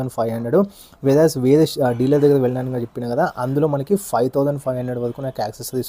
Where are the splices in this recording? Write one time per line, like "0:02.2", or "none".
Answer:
none